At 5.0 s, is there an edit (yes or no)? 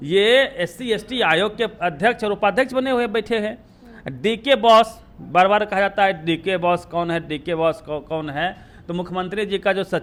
no